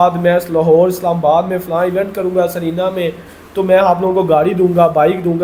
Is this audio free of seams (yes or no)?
yes